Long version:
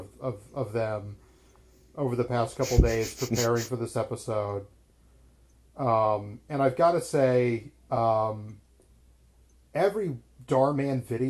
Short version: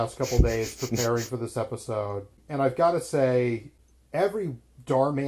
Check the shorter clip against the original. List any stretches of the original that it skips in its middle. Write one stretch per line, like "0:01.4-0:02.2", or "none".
0:04.8-0:06.4
0:07.7-0:09.3